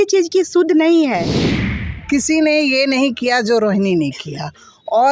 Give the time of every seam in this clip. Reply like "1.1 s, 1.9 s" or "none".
1.4 s